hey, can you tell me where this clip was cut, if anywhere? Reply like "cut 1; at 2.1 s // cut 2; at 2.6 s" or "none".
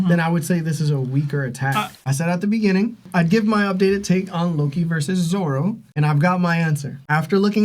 cut 1; at 1.9 s